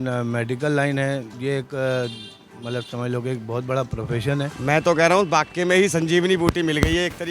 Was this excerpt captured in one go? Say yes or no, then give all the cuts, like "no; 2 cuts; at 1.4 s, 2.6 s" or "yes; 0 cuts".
no; 2 cuts; at 1.3 s, 4.6 s